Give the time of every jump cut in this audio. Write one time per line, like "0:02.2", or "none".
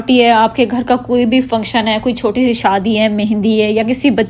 none